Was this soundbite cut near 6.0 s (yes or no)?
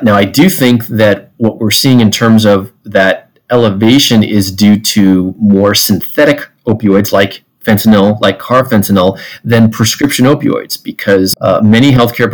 no